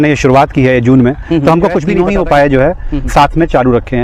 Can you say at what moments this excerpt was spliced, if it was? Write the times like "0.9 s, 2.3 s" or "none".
1.9 s